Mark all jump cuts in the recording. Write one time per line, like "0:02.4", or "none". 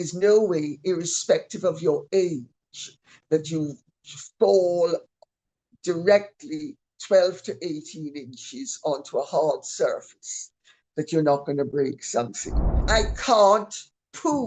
0:12.8